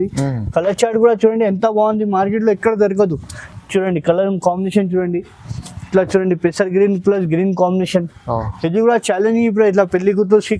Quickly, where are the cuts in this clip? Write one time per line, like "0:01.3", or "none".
none